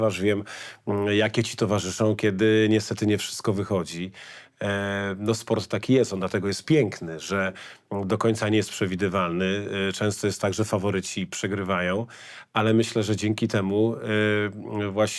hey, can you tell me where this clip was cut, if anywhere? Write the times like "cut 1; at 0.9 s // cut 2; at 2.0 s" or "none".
none